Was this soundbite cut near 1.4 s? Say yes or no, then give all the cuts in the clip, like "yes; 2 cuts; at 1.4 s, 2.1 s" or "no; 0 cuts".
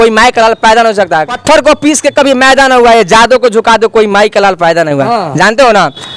yes; 1 cut; at 1.4 s